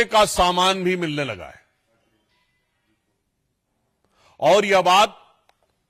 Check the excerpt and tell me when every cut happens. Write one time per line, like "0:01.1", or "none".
none